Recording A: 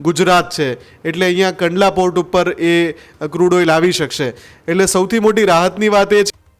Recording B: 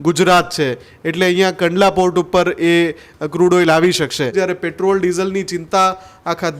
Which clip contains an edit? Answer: B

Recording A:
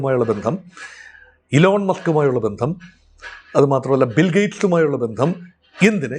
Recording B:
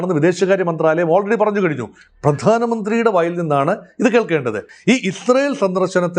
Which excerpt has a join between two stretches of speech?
B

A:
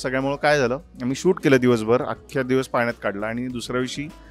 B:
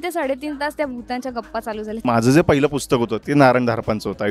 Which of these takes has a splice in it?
B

